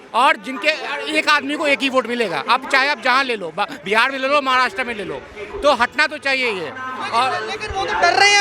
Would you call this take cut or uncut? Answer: uncut